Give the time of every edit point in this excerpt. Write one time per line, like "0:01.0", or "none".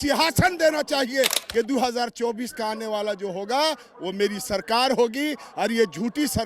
0:01.4

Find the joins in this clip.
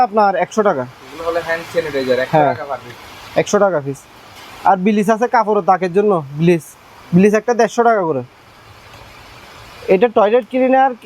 none

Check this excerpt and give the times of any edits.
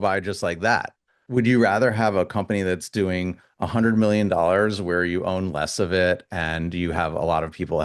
0:01.2

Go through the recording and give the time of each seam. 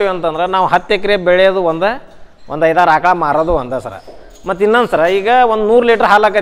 none

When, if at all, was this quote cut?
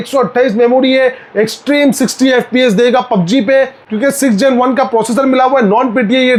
none

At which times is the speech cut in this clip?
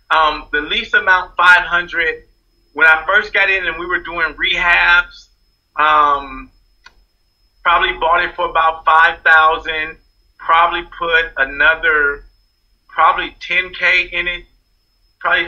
none

